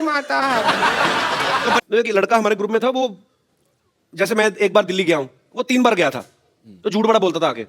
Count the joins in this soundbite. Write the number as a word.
one